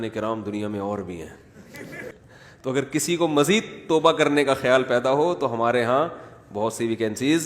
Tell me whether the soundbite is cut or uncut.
cut